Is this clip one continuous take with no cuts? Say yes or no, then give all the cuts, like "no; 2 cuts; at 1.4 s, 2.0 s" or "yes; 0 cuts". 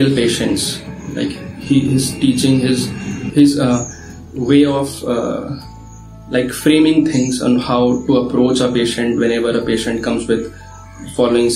no; 1 cut; at 3.1 s